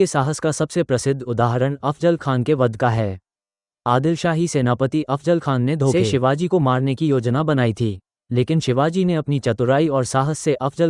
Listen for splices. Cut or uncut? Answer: uncut